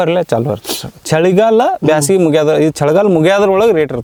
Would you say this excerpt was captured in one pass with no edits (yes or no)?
yes